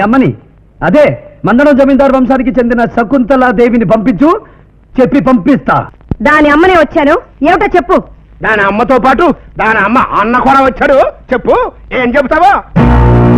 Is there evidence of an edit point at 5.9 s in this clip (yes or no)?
yes